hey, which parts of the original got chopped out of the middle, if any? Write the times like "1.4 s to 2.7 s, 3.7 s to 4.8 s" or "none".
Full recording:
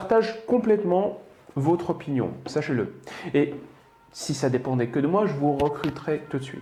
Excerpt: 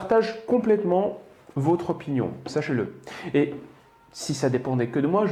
none